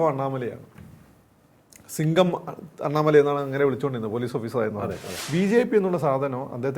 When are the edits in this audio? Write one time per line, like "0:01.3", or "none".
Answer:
0:05.1

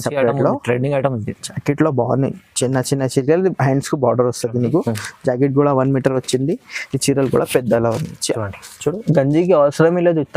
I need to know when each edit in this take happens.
none

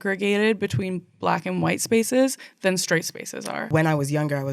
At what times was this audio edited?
0:03.6

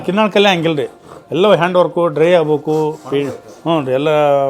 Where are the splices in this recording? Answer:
none

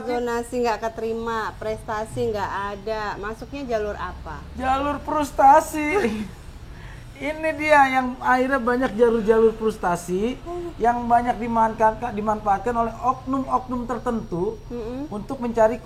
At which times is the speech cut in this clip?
none

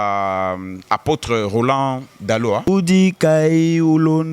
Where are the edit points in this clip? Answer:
0:02.7

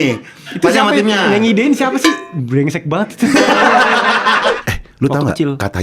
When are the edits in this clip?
0:04.6

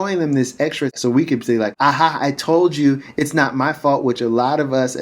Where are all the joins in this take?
0:00.9
0:01.7

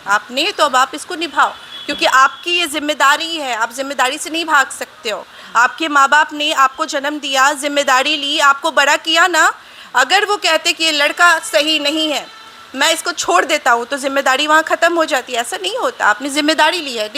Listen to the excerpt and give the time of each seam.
none

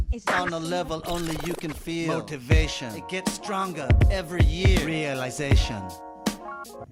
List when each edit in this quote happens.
none

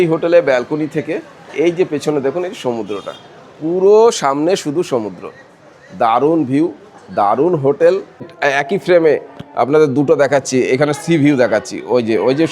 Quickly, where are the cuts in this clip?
0:08.3

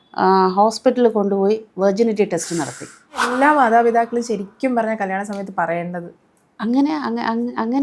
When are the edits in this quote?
0:03.3

